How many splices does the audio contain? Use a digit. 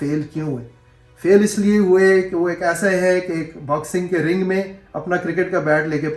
0